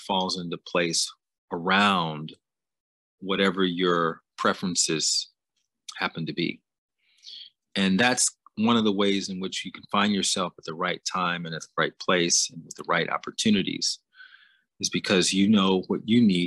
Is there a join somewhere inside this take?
no; 0 cuts

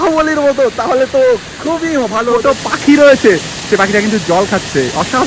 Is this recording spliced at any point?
yes; 1 cut; at 2.4 s

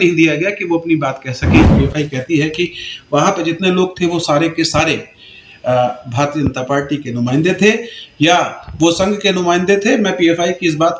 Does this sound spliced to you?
yes; 1 cut; at 1.7 s

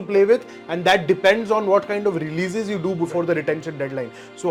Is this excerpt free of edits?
yes; 0 cuts

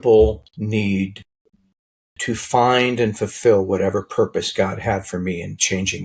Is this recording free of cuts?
yes; 0 cuts

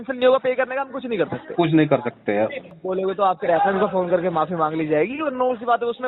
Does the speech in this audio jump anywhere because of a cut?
yes; 1 cut; at 2.7 s

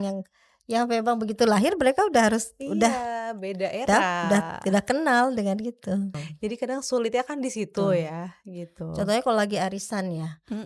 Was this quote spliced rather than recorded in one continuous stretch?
yes; 1 cut; at 6.2 s

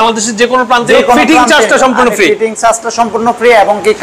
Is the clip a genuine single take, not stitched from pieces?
yes; 0 cuts

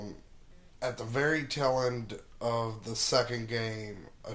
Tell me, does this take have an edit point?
no; 0 cuts

